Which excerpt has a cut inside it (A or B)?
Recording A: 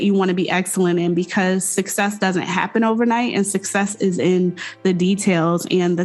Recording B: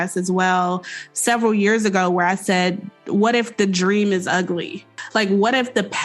B